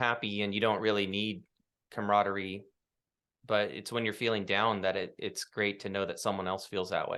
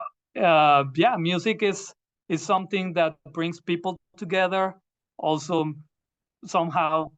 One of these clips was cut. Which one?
second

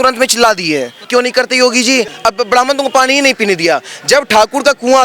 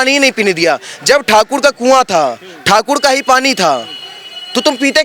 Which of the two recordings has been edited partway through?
first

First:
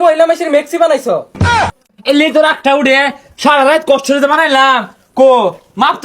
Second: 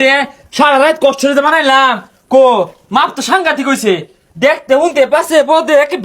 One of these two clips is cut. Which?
first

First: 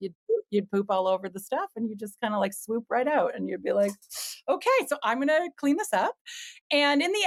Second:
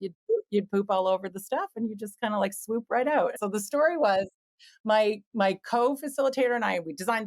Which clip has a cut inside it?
second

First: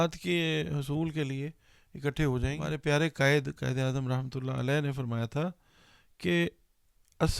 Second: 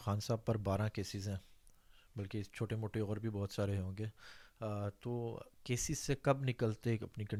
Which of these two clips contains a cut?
first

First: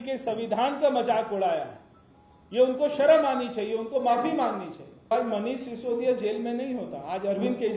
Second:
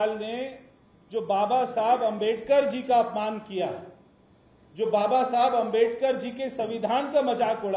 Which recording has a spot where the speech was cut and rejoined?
first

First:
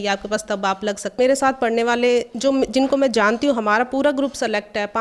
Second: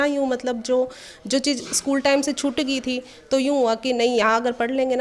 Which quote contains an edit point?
first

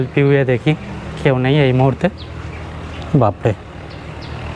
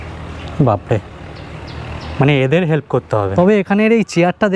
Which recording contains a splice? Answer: second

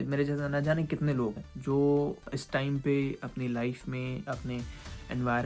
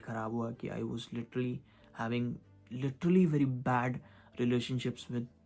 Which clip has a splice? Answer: first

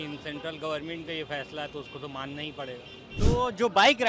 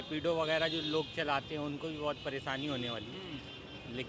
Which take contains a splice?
first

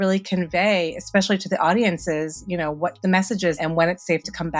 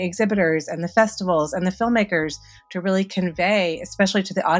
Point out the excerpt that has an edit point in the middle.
first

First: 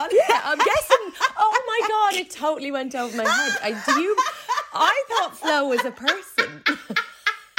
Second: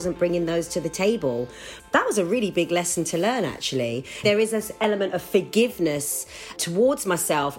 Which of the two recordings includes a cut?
second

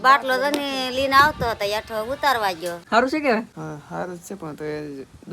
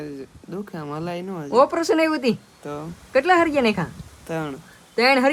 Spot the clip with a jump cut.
first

